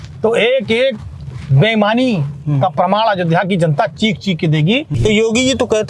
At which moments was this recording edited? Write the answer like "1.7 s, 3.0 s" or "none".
4.9 s